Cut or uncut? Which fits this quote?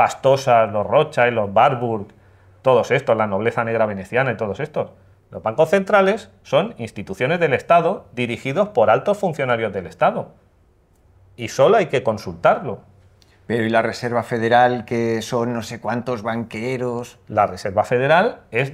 uncut